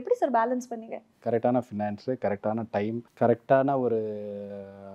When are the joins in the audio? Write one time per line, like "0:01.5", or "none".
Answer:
0:01.1
0:03.1